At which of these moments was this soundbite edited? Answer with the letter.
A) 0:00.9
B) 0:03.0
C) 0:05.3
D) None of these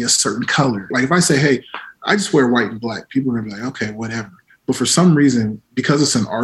A